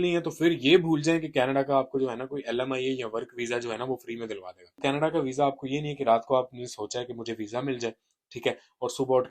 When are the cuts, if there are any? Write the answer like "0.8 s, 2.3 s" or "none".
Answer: 4.8 s